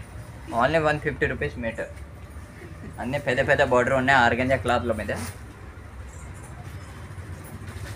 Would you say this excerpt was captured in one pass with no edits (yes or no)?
yes